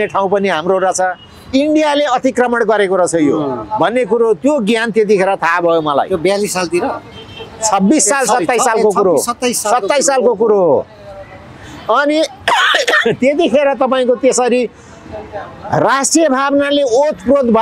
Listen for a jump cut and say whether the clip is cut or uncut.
uncut